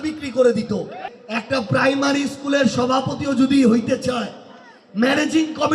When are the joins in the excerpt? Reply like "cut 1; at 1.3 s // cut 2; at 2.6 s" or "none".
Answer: cut 1; at 1.0 s